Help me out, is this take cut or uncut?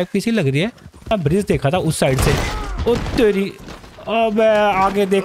cut